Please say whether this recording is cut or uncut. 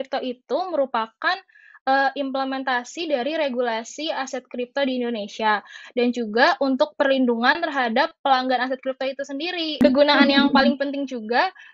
cut